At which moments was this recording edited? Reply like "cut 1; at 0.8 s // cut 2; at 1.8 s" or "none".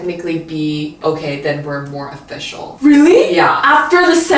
cut 1; at 1.0 s // cut 2; at 2.7 s